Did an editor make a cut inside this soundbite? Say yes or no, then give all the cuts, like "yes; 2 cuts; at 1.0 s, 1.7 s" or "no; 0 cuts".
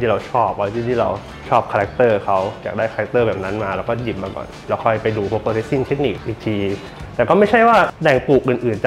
no; 0 cuts